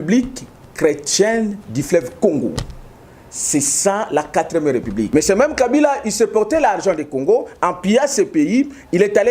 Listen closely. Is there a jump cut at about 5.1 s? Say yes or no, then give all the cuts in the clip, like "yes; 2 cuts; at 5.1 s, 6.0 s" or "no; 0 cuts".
yes; 1 cut; at 5.1 s